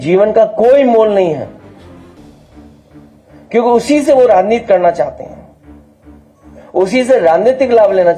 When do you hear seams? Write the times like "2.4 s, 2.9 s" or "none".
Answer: none